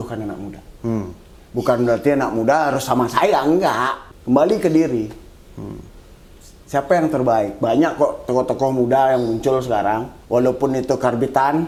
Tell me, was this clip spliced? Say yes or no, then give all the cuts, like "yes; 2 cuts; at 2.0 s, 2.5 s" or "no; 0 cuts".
no; 0 cuts